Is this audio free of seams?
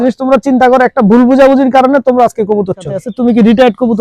no; 1 cut; at 3.0 s

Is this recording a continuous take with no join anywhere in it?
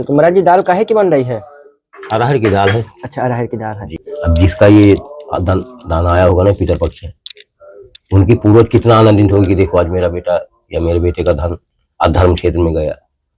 no; 1 cut; at 4.0 s

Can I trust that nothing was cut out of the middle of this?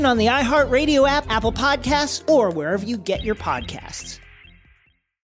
no; 1 cut; at 3.9 s

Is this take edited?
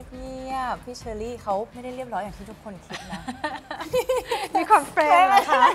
yes; 2 cuts; at 0.9 s, 1.7 s

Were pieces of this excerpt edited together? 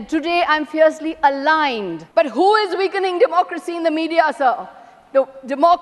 yes; 1 cut; at 2.0 s

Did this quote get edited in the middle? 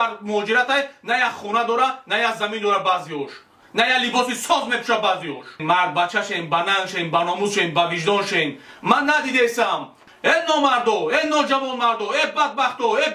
yes; 2 cuts; at 5.6 s, 10.0 s

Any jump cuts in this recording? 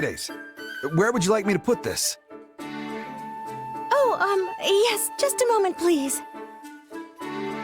no; 0 cuts

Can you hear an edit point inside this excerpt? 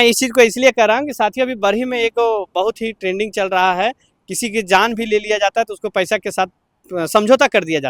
no; 0 cuts

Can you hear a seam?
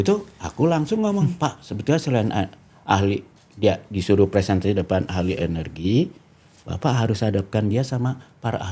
no; 0 cuts

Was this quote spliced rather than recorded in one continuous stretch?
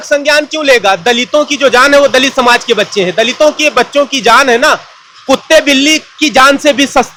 no; 0 cuts

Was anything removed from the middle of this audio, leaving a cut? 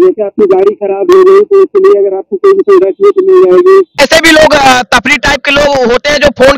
yes; 1 cut; at 4.0 s

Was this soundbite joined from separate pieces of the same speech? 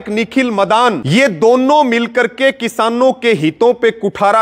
yes; 1 cut; at 1.0 s

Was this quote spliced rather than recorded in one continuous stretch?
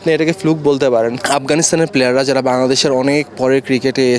yes; 1 cut; at 1.2 s

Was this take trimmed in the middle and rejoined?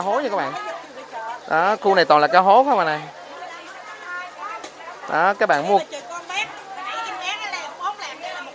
no; 0 cuts

